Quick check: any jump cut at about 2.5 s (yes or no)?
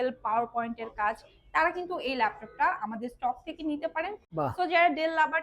no